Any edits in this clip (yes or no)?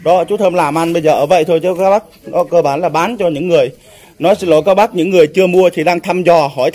no